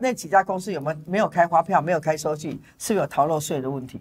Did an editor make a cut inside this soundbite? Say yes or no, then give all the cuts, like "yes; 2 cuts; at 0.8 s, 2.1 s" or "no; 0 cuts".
no; 0 cuts